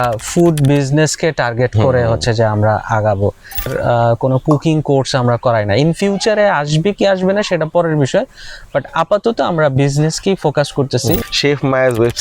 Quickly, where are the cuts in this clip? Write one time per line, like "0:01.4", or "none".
0:03.7
0:11.2